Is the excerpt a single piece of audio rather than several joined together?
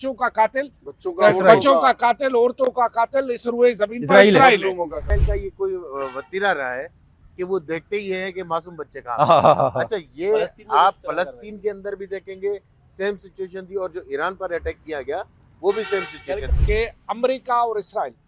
no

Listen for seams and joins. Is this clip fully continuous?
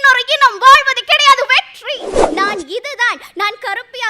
no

